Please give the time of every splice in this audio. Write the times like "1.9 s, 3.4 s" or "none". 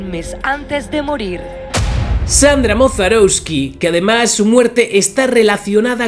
none